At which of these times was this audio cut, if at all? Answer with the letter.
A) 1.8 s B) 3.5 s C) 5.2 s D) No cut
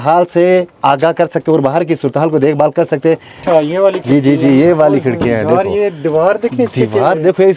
B